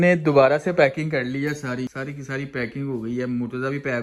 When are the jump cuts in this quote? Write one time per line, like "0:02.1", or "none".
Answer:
none